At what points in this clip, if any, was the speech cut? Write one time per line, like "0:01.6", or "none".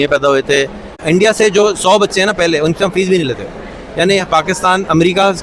0:01.0